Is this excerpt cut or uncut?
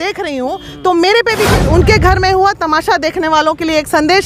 cut